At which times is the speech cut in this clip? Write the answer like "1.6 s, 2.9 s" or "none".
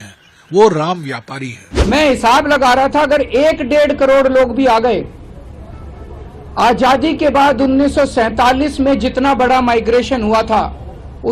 1.7 s